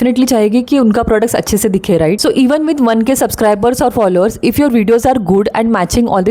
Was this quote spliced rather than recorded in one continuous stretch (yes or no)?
no